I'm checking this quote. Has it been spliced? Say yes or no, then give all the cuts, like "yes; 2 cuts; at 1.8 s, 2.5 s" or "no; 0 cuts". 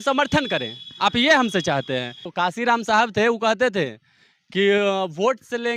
yes; 1 cut; at 2.2 s